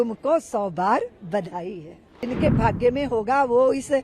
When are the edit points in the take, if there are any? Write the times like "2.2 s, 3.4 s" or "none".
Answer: 2.2 s